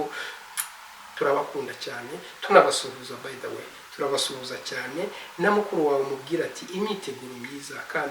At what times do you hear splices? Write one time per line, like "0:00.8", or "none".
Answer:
0:01.0

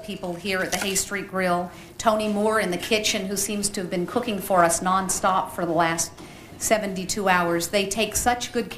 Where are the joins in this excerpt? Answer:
0:02.4

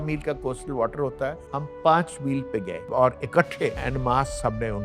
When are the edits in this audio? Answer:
0:02.8
0:03.8

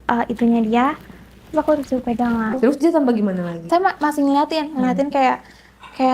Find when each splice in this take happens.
0:02.6
0:03.5

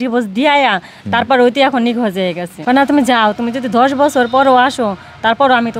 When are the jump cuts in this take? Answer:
0:02.5

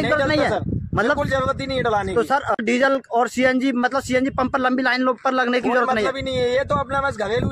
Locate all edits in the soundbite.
none

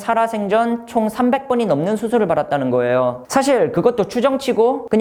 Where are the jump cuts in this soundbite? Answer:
none

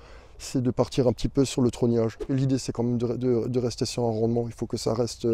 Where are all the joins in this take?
0:02.3

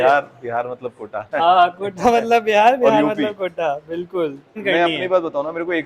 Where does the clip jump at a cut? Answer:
0:04.6

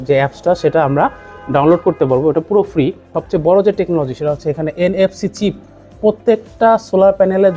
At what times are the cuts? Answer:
0:03.1

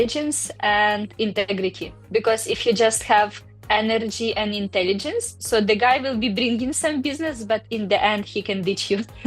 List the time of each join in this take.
none

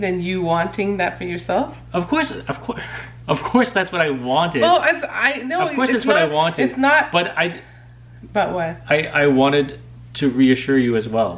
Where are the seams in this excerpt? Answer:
none

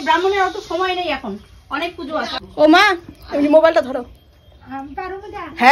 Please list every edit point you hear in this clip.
0:02.4

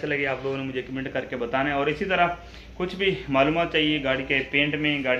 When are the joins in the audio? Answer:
none

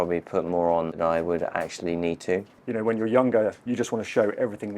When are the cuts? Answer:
0:01.0
0:02.6

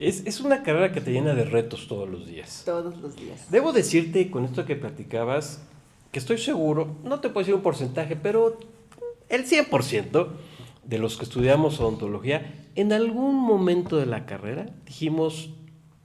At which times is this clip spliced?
none

